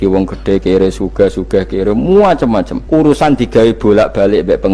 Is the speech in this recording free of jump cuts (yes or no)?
no